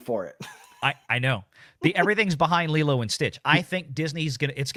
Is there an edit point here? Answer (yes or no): no